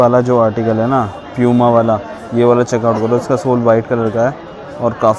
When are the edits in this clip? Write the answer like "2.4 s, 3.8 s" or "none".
none